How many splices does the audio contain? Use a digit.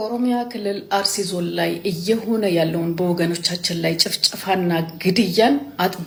0